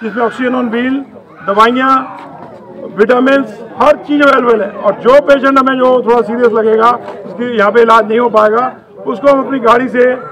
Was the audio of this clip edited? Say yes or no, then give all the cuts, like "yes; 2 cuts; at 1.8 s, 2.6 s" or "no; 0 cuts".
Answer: no; 0 cuts